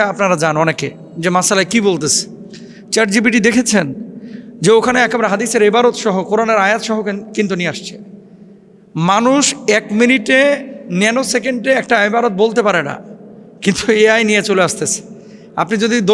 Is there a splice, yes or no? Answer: no